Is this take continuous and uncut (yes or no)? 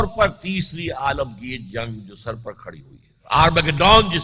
yes